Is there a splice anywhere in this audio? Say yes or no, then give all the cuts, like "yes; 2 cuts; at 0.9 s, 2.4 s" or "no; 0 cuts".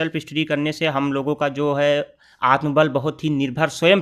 no; 0 cuts